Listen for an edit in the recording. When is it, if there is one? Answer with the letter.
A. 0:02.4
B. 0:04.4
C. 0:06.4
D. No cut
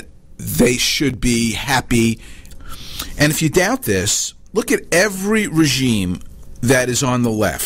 A